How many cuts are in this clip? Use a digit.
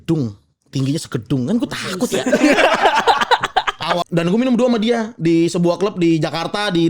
1